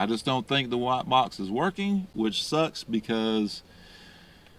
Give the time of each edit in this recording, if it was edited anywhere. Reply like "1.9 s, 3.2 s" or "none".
none